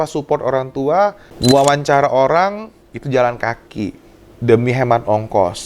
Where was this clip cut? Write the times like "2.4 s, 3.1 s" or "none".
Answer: 1.3 s